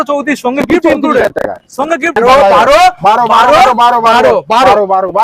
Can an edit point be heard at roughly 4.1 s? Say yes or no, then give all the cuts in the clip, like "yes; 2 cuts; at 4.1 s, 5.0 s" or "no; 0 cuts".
no; 1 cut; at 2.1 s